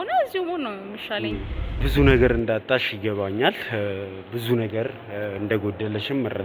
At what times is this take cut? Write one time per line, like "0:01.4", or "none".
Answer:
0:01.6